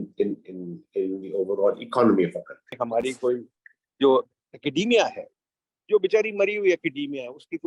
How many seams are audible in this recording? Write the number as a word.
one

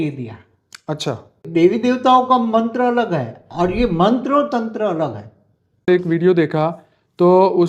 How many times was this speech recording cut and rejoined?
two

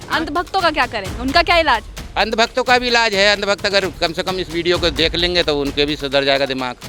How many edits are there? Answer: zero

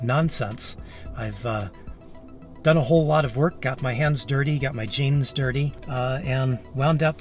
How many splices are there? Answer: one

